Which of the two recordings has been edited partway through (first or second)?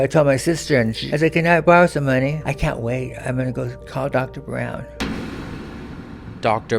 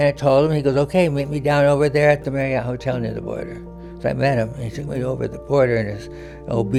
first